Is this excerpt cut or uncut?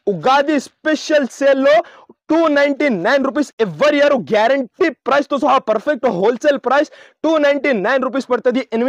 uncut